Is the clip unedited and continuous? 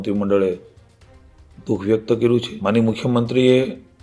no; 1 cut; at 2.5 s

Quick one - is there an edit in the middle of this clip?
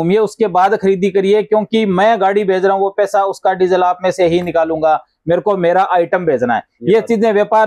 no; 0 cuts

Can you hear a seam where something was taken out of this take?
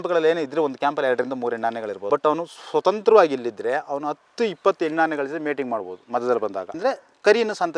yes; 1 cut; at 2.0 s

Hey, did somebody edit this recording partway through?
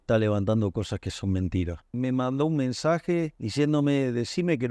yes; 2 cuts; at 1.9 s, 3.4 s

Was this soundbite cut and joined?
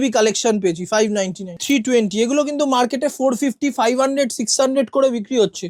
yes; 1 cut; at 1.6 s

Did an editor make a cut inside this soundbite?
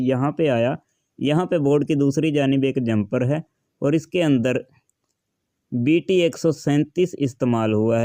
no; 0 cuts

